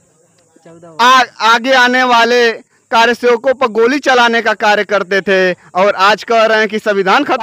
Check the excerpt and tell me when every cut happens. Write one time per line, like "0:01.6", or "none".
none